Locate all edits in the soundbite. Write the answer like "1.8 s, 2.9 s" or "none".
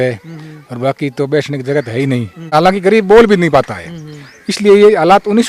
2.4 s